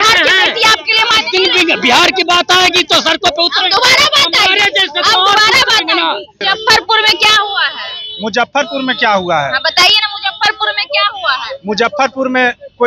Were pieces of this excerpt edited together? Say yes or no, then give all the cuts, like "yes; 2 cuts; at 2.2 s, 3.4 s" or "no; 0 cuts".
yes; 1 cut; at 6.4 s